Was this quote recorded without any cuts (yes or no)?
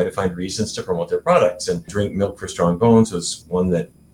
no